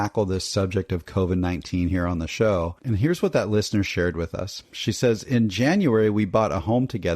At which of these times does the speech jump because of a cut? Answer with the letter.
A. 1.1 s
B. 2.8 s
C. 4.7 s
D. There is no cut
B